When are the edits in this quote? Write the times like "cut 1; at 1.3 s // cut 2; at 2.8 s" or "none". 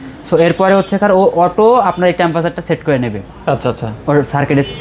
none

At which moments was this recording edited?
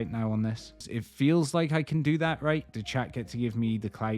cut 1; at 1.0 s // cut 2; at 2.8 s

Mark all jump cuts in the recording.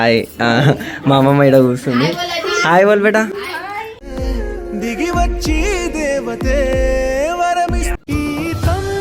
cut 1; at 7.9 s

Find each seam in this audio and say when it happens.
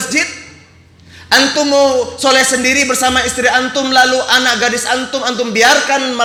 none

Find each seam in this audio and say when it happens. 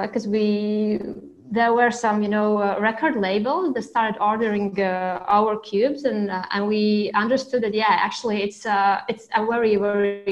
none

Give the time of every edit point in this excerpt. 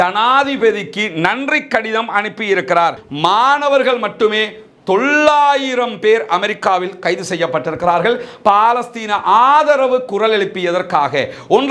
cut 1; at 3.1 s

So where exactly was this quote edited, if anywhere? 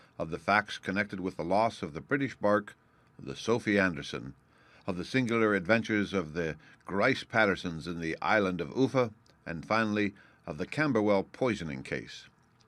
cut 1; at 1.1 s

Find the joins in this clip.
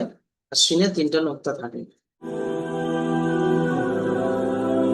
cut 1; at 2.3 s

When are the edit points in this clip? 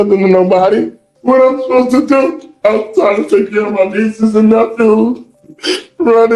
cut 1; at 1.0 s

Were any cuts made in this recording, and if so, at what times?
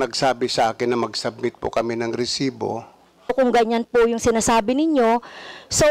cut 1; at 3.3 s

